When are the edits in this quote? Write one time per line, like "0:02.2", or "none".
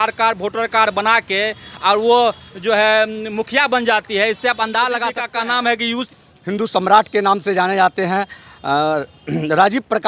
0:05.2
0:06.1